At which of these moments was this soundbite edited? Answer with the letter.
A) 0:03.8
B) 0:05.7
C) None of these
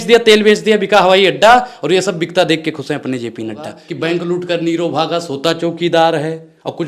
A